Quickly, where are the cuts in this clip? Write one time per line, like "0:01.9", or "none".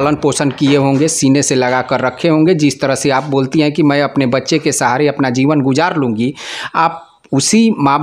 none

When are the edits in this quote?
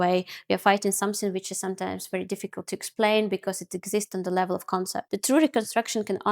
0:05.0

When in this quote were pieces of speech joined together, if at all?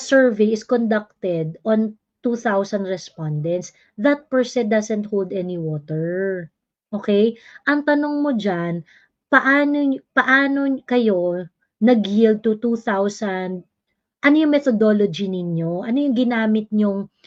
none

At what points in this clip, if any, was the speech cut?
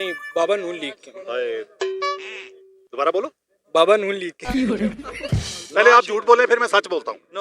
0:04.4
0:05.1

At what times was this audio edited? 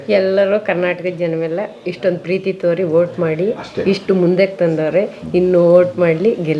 none

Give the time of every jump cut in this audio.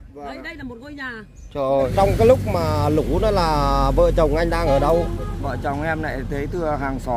0:01.9

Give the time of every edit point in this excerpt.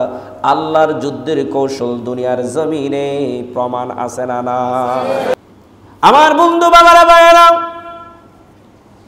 0:05.3

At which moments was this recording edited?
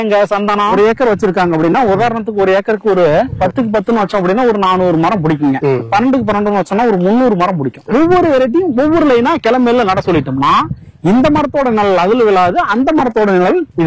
0:00.7
0:03.3
0:07.7

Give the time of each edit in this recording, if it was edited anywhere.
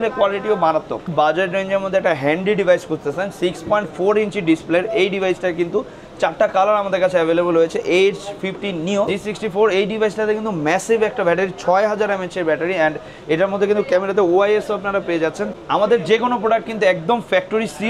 0:01.1
0:09.1
0:15.6

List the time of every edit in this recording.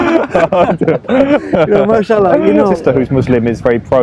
0:02.8

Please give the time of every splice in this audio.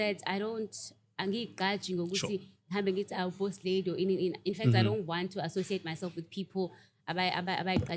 none

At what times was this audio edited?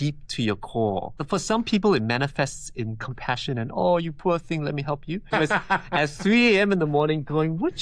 0:01.2
0:05.3

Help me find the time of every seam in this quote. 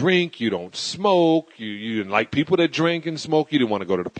0:01.8

